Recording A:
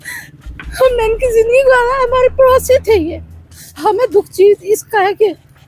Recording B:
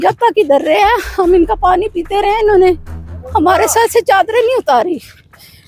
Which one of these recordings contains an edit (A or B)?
A